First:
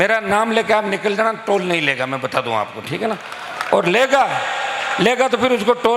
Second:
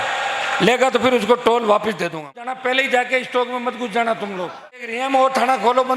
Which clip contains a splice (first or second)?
second